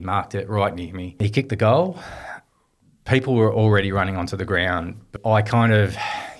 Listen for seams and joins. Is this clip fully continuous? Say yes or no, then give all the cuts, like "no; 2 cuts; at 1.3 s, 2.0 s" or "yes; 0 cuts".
no; 2 cuts; at 1.2 s, 5.2 s